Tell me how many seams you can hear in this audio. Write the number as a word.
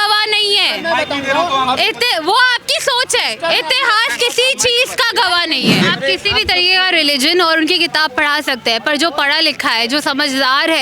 one